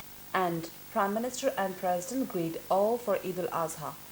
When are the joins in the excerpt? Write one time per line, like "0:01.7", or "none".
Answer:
none